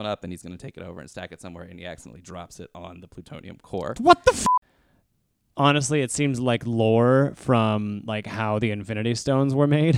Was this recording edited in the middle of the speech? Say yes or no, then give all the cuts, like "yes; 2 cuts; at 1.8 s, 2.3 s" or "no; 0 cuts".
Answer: yes; 1 cut; at 4.4 s